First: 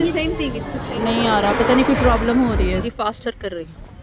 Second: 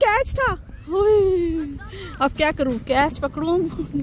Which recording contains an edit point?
first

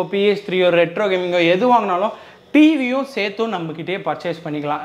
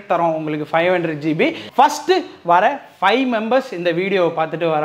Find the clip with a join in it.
second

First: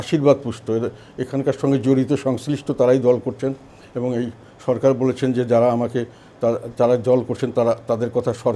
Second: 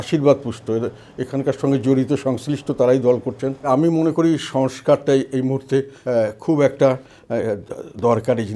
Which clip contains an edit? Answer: second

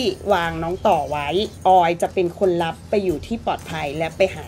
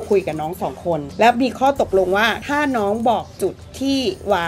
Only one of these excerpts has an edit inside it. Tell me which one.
second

